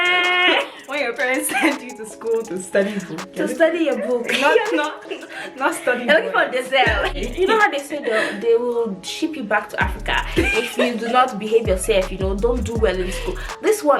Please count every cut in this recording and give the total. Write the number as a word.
one